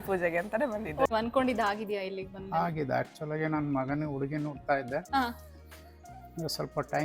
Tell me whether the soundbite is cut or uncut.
cut